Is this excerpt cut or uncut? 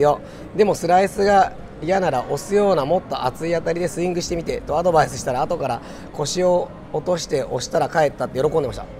uncut